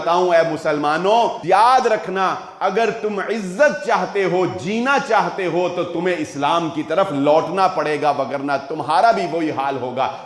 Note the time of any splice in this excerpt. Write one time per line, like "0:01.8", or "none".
0:01.4